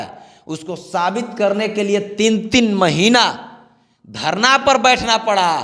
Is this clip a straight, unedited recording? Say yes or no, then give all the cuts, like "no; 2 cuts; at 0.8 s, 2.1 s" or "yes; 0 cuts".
yes; 0 cuts